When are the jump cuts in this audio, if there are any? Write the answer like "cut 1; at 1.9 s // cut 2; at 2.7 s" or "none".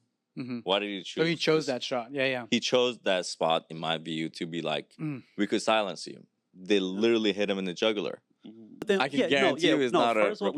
cut 1; at 8.9 s